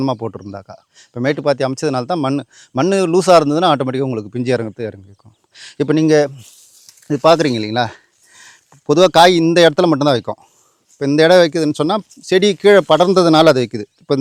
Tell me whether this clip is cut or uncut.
uncut